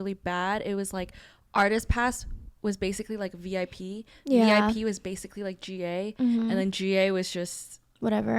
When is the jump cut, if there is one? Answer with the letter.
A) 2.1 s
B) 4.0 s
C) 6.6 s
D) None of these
D